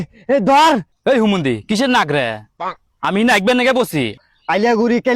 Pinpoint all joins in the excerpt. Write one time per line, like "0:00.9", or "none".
0:01.0
0:04.2